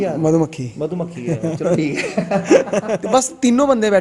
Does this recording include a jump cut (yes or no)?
yes